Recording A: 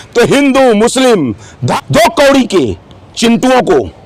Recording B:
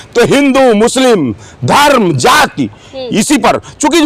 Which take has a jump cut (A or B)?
A